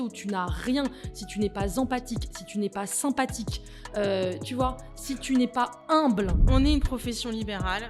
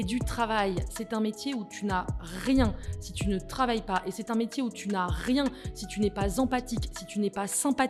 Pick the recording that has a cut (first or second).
first